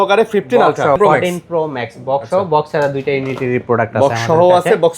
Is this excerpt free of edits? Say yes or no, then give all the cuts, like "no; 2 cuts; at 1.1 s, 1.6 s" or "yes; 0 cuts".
no; 1 cut; at 1.0 s